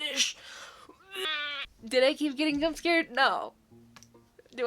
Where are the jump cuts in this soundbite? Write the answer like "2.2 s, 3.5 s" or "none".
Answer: 1.7 s